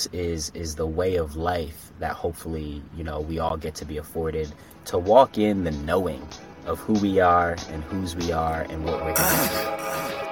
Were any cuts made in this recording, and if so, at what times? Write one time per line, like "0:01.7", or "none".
0:09.0